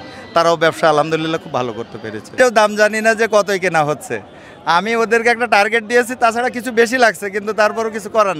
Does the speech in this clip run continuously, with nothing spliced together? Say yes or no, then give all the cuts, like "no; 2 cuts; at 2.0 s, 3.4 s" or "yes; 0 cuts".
no; 1 cut; at 2.3 s